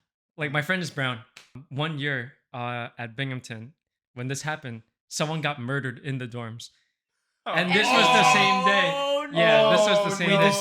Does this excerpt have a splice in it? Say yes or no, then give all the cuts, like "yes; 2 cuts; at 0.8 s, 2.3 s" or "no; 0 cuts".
yes; 1 cut; at 1.6 s